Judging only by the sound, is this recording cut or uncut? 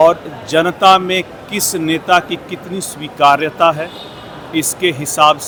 uncut